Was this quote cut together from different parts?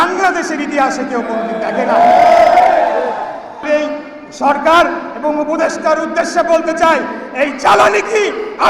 yes; 1 cut; at 3.6 s

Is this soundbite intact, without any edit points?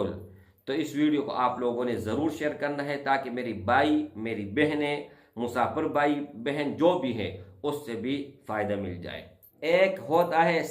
no; 1 cut; at 9.5 s

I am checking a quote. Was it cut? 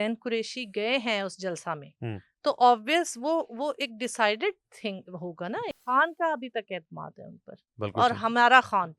yes; 1 cut; at 5.8 s

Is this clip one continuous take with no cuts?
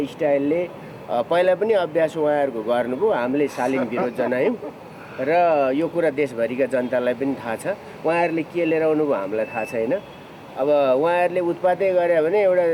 yes; 0 cuts

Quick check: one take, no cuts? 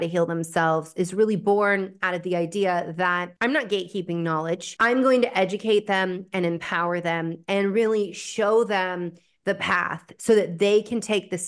no; 2 cuts; at 3.3 s, 4.7 s

